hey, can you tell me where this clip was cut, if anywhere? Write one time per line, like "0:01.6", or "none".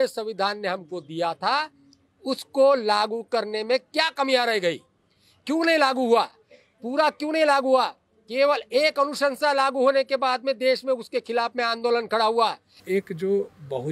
0:12.7